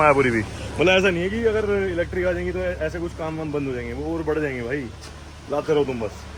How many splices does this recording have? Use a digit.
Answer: 0